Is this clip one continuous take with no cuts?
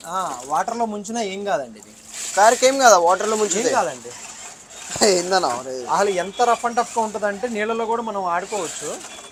yes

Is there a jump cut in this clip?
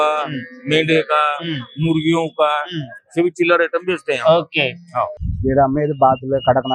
yes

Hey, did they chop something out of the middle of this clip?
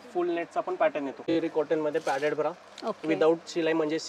yes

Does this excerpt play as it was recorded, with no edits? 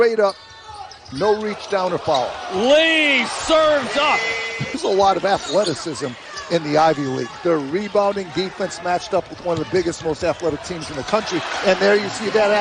yes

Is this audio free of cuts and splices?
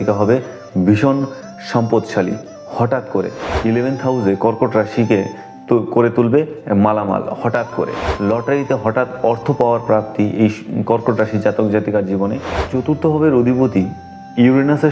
no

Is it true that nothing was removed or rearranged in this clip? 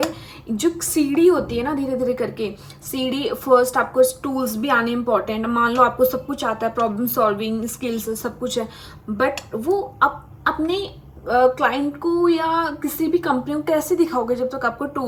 yes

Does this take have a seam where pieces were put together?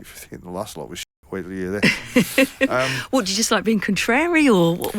no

